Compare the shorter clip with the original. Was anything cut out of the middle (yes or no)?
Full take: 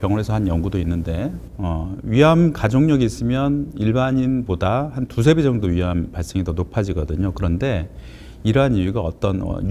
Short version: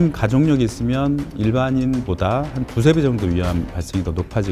no